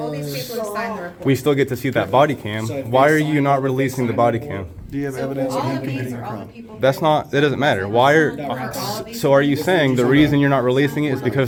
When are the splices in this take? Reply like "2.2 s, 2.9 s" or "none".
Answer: none